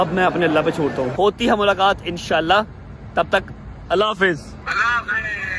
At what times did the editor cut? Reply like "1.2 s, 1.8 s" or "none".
1.1 s, 4.6 s